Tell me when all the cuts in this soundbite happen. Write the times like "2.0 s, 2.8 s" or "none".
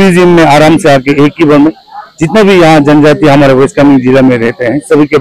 none